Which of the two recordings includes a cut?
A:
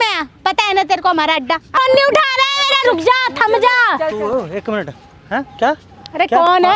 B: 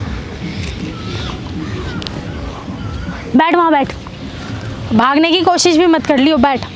A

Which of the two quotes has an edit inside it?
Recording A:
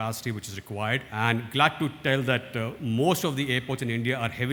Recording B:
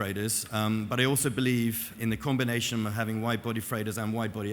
B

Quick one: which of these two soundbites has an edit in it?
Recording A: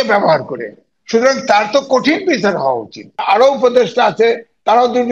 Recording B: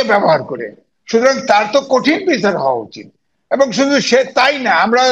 A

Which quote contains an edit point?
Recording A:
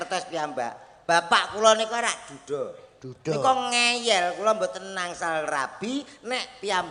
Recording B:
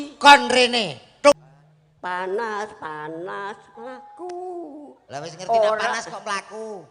B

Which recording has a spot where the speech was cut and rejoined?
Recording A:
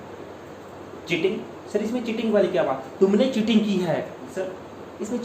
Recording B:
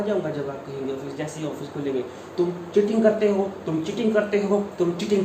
A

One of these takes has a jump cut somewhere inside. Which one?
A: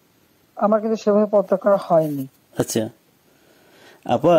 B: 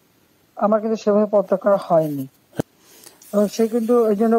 B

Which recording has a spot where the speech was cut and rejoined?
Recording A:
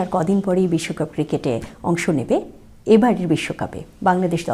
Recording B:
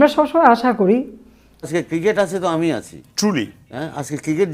B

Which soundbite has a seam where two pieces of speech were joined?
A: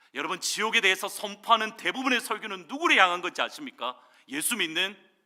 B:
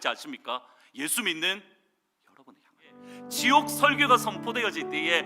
B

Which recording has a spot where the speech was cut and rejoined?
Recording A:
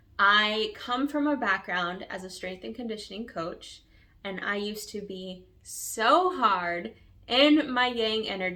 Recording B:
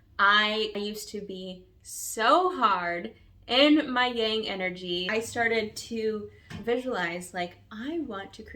B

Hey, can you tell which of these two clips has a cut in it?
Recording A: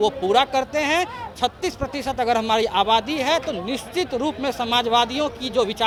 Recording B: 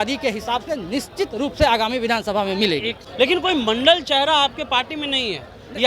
B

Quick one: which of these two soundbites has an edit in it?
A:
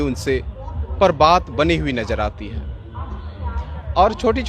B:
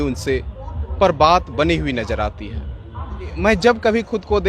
B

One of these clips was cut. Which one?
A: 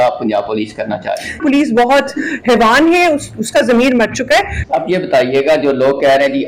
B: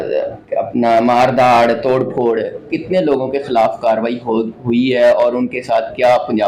A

